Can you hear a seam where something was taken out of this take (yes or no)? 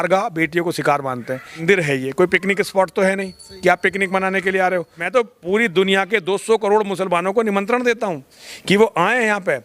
yes